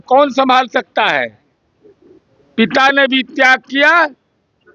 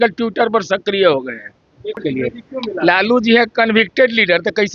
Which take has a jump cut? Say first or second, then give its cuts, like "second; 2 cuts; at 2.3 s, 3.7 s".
second; 1 cut; at 2.0 s